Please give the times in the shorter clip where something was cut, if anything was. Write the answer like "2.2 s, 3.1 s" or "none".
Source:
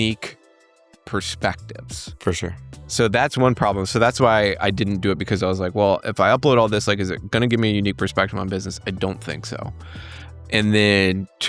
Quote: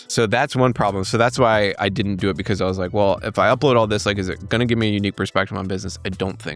none